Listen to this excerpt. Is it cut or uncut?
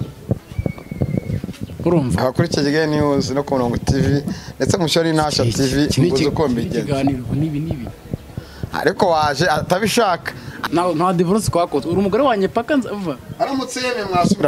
cut